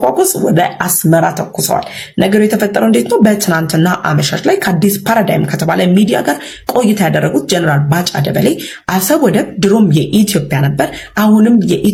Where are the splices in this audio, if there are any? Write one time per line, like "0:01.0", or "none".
none